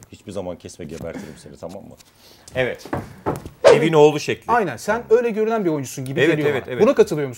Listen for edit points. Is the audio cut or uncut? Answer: cut